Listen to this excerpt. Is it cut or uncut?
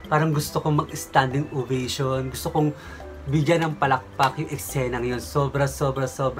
uncut